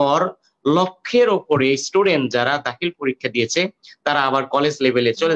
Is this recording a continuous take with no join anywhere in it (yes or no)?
yes